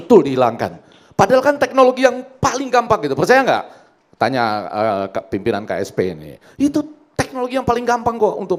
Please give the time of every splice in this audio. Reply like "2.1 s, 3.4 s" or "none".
none